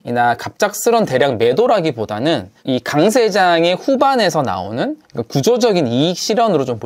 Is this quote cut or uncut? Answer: uncut